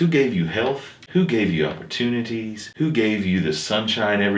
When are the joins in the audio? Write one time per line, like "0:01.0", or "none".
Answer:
0:00.9
0:02.6

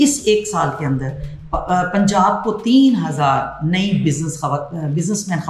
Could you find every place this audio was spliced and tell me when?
none

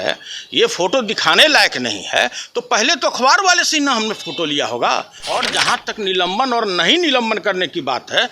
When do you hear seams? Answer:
0:05.2

